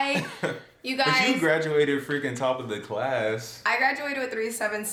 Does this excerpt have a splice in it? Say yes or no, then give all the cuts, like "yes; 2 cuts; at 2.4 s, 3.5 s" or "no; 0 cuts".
no; 0 cuts